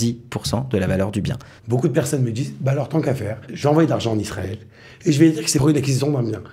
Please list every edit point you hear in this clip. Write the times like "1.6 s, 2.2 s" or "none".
1.5 s, 3.5 s, 5.6 s